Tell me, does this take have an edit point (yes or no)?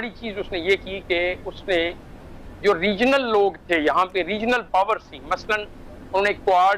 no